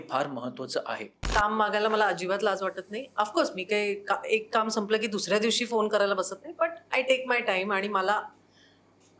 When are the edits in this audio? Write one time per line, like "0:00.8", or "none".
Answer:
0:01.2